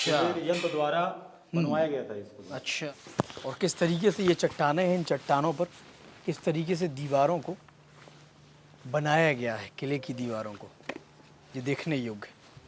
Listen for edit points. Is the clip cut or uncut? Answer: cut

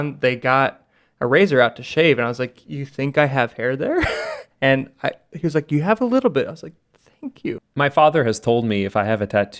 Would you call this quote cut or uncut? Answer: cut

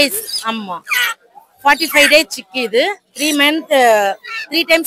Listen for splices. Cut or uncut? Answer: uncut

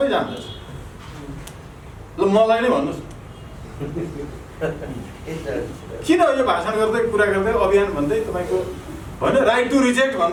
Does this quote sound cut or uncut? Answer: uncut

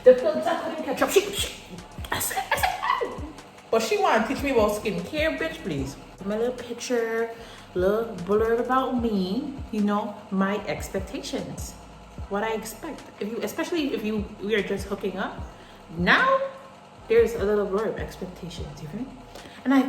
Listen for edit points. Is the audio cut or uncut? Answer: cut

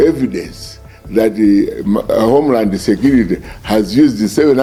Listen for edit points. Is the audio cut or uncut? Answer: uncut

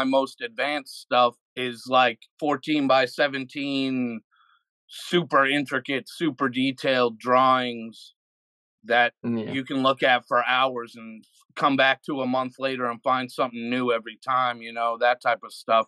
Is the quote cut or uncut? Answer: cut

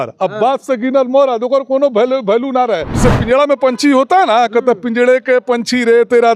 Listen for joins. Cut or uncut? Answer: cut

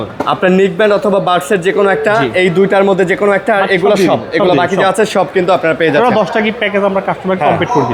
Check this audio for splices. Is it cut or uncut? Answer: uncut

